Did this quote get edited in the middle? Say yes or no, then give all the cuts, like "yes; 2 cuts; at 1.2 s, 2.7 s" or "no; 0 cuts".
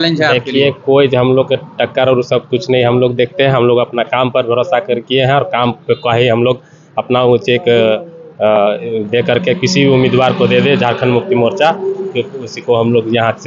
no; 0 cuts